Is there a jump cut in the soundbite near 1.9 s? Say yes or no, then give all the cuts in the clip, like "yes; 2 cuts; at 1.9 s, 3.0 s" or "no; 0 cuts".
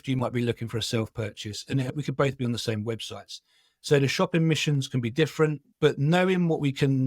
yes; 2 cuts; at 1.9 s, 5.6 s